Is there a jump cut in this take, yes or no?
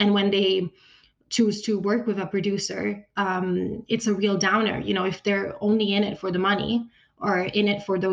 no